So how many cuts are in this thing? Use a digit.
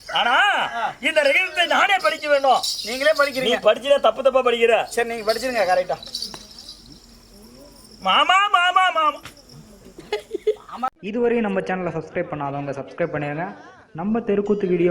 1